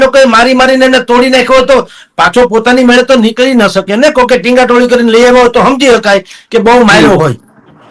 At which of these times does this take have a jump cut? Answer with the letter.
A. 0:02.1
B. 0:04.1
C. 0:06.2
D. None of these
D